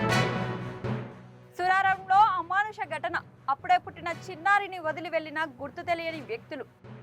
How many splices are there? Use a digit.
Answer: 1